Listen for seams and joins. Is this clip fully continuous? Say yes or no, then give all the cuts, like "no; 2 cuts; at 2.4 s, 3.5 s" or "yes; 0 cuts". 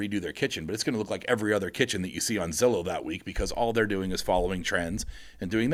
yes; 0 cuts